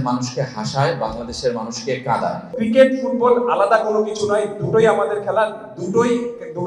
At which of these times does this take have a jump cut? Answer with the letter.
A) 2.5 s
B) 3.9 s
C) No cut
A